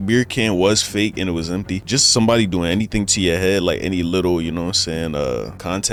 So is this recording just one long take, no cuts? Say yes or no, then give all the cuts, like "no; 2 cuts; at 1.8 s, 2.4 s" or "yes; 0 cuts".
yes; 0 cuts